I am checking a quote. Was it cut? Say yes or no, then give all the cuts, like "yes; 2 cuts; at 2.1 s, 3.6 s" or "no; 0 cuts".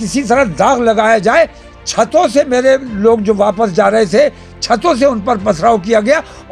no; 0 cuts